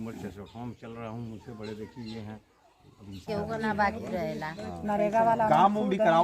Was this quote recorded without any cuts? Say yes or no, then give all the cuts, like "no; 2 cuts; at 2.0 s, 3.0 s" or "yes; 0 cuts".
no; 1 cut; at 3.2 s